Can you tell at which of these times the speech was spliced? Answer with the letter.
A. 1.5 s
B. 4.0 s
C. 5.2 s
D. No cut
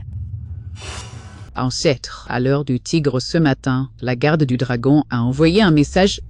A